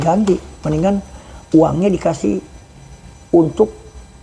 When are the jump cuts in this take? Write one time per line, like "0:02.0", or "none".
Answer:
none